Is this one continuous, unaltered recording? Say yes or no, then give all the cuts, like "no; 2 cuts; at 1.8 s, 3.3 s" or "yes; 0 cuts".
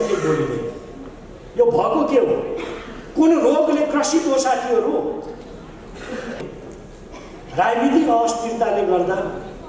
no; 1 cut; at 6.4 s